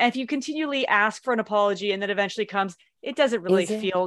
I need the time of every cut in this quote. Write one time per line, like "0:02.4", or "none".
none